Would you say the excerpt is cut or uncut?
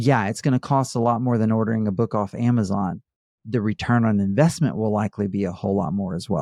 uncut